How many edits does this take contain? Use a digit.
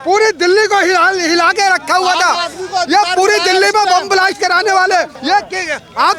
1